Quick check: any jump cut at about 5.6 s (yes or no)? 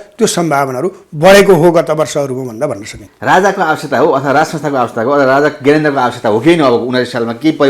no